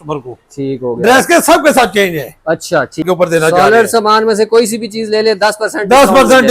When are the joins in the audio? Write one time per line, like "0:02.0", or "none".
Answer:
0:03.0